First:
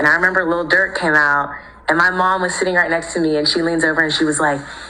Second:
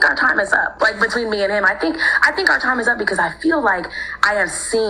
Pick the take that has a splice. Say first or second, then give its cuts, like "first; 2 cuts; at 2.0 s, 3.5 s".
first; 1 cut; at 3.7 s